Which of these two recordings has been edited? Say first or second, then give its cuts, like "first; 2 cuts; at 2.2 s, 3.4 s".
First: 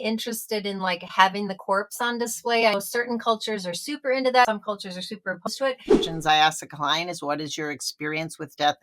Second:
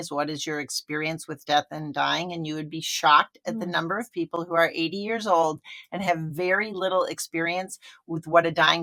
first; 2 cuts; at 4.5 s, 6.1 s